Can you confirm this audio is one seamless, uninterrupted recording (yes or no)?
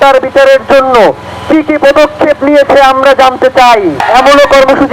no